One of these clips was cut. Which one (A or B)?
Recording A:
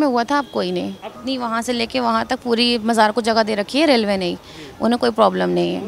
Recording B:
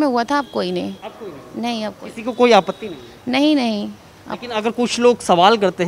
A